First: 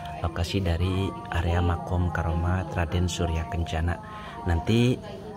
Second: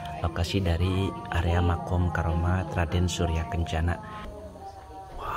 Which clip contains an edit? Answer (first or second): second